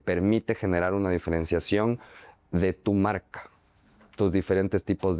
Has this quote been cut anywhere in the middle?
no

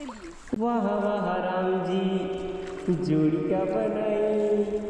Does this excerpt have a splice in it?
no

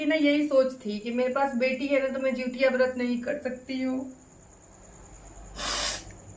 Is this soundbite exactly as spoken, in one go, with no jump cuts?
yes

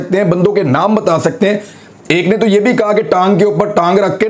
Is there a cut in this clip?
yes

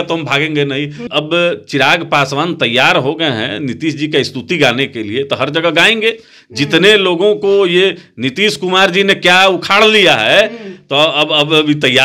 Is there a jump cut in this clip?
yes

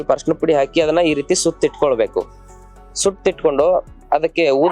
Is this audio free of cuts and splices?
yes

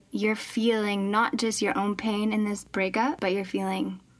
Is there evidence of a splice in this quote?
yes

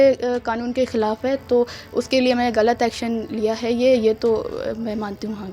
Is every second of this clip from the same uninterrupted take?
yes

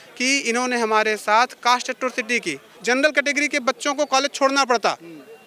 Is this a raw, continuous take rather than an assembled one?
no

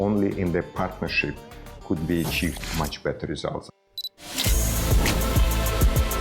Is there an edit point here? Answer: yes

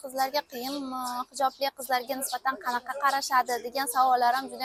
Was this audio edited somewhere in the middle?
no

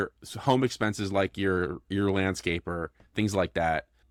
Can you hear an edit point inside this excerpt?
no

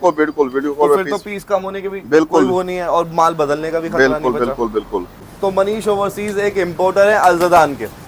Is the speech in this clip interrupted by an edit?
yes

